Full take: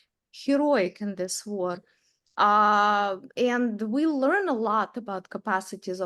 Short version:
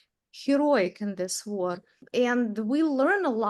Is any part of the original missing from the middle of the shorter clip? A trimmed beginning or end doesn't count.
yes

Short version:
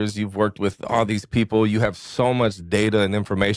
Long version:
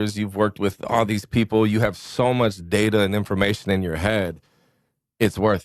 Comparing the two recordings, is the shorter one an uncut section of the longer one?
yes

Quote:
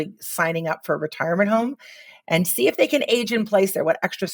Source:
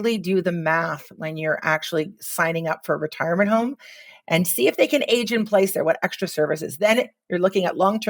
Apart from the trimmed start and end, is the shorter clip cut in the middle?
no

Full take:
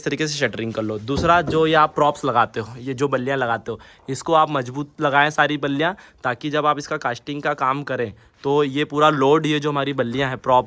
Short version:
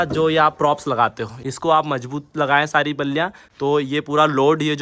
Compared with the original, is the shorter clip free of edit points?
no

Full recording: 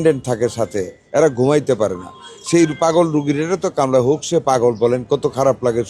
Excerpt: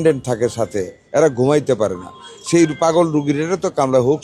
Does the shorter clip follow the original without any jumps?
yes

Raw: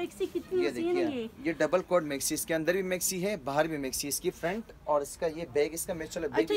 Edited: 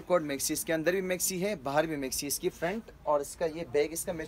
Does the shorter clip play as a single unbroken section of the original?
yes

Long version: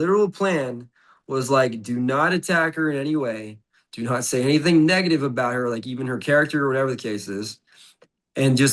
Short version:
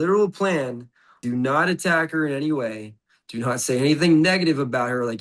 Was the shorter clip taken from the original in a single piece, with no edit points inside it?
no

